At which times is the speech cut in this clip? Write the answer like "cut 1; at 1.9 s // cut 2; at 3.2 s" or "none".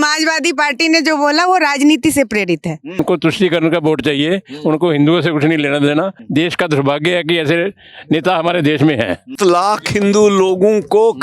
cut 1; at 3.0 s // cut 2; at 6.2 s // cut 3; at 9.3 s

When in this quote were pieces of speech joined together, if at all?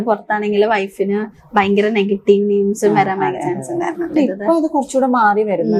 cut 1; at 4.2 s

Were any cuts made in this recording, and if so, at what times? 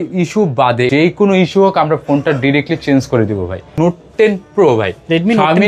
cut 1; at 0.9 s // cut 2; at 3.8 s

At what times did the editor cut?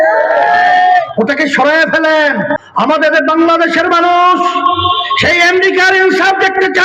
cut 1; at 2.5 s

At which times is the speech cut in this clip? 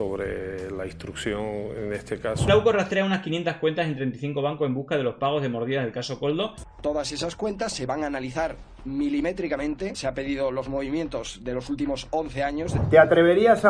cut 1; at 2.5 s // cut 2; at 6.6 s // cut 3; at 10.0 s // cut 4; at 12.8 s

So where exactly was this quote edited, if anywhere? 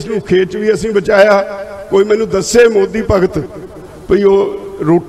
none

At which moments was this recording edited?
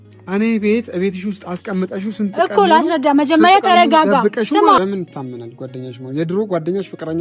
cut 1; at 4.8 s

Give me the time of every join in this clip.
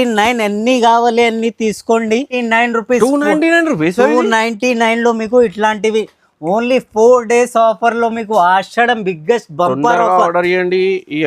cut 1; at 2.3 s

